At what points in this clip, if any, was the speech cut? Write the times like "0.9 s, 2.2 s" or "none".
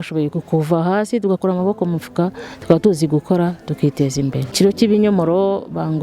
4.5 s